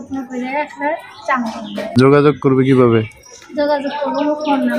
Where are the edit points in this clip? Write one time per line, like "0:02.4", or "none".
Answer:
0:02.0

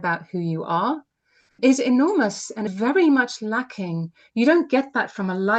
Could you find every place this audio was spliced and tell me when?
0:01.6
0:02.7

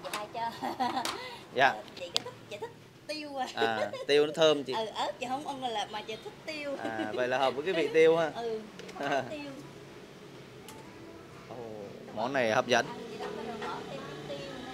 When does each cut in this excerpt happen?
none

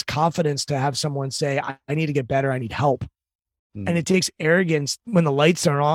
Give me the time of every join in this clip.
0:05.0

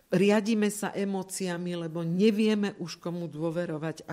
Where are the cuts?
none

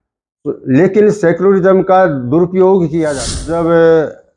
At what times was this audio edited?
0:03.4

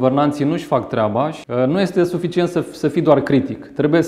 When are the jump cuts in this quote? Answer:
0:01.4

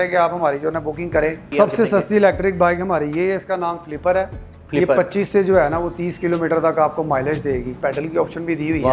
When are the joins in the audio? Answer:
0:01.4
0:07.8

